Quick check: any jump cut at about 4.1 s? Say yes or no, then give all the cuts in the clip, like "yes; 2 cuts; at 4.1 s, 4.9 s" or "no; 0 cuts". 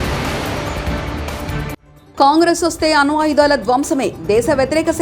no; 1 cut; at 1.9 s